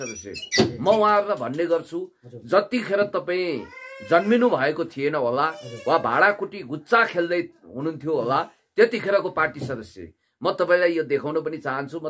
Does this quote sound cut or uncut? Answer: uncut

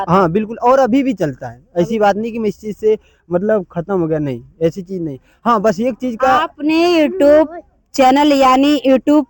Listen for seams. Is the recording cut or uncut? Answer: uncut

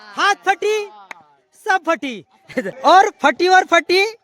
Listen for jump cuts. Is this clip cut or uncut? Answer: cut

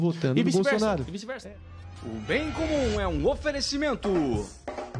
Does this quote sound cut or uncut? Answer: cut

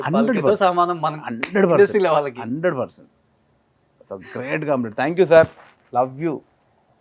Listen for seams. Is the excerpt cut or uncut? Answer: uncut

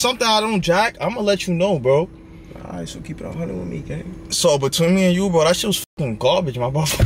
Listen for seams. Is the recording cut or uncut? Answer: uncut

